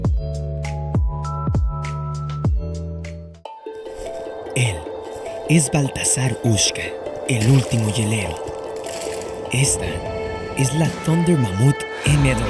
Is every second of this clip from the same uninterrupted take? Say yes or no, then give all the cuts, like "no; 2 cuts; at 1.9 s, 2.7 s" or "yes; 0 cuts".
yes; 0 cuts